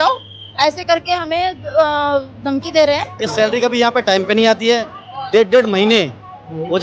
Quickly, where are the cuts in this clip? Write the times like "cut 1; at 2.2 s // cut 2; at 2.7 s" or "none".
cut 1; at 3.2 s